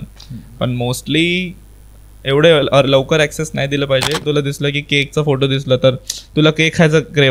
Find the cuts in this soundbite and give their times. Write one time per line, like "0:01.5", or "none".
0:04.2